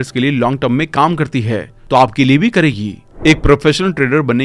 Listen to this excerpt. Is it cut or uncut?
cut